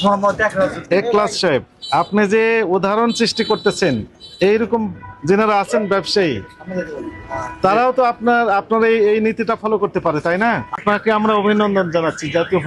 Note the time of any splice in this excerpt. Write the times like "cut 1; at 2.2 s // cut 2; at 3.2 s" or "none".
cut 1; at 10.8 s